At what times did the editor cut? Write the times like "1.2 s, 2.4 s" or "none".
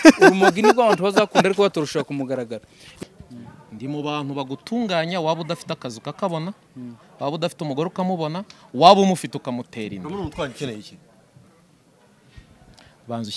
3.0 s